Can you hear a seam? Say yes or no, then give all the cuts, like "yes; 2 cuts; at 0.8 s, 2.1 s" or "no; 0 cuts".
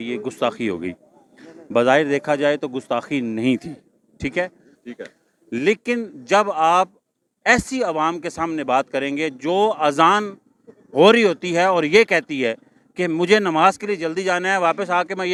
no; 0 cuts